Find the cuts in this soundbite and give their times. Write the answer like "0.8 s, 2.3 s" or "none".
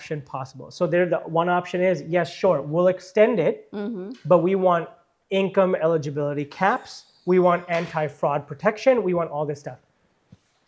none